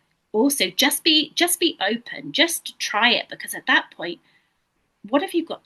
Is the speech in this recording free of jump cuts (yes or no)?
yes